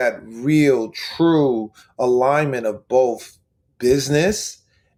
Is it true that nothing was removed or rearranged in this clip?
yes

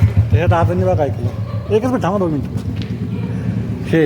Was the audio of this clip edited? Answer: no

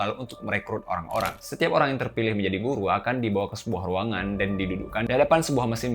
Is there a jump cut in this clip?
yes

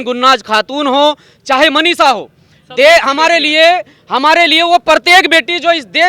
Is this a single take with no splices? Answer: yes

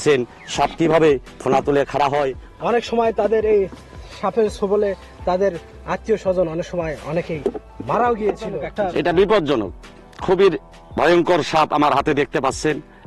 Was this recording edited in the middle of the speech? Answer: yes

